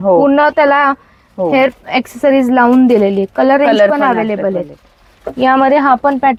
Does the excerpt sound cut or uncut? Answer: uncut